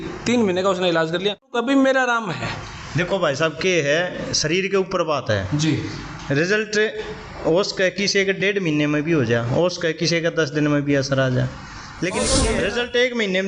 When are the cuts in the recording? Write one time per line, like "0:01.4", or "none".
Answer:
0:01.6
0:12.5